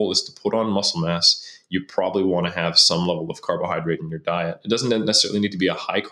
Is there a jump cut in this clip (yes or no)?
no